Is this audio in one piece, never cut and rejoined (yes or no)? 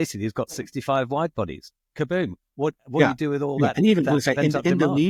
yes